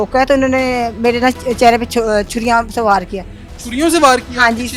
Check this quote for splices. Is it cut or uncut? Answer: uncut